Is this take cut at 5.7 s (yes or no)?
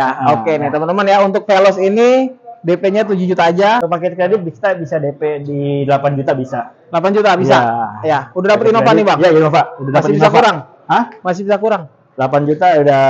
no